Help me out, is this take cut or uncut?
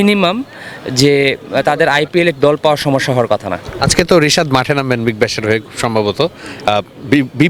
uncut